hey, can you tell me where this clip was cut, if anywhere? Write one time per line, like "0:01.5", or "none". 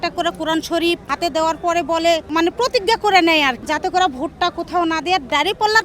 0:01.1
0:02.3
0:03.6